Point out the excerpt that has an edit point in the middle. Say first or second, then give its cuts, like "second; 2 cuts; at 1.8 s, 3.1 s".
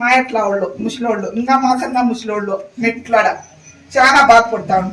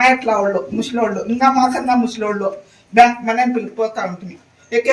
first; 1 cut; at 2.7 s